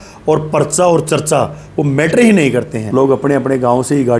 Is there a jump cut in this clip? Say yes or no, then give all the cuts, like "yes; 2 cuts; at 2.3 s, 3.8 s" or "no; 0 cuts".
yes; 1 cut; at 2.8 s